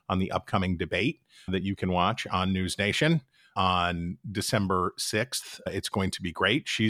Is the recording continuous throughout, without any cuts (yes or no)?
no